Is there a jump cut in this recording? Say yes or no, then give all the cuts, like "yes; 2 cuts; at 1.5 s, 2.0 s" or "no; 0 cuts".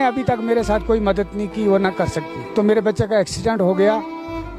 yes; 1 cut; at 2.4 s